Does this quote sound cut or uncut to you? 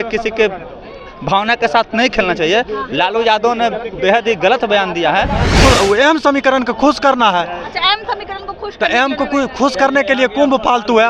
cut